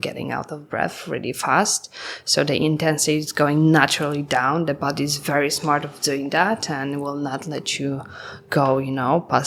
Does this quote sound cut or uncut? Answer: uncut